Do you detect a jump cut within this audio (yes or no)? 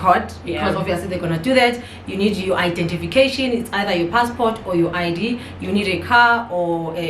no